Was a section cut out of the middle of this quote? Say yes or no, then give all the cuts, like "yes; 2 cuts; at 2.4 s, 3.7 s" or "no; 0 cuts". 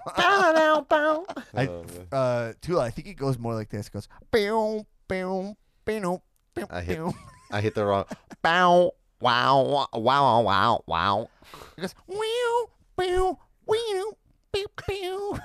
yes; 1 cut; at 1.2 s